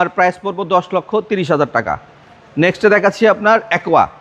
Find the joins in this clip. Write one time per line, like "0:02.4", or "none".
none